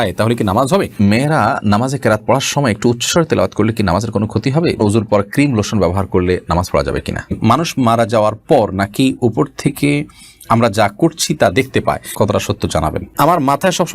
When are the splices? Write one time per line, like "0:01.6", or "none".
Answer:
0:00.9
0:04.8
0:07.4
0:12.1
0:13.2